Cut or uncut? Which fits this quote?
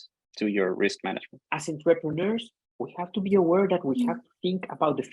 cut